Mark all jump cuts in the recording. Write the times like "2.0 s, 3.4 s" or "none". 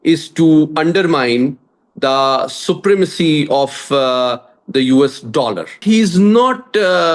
5.8 s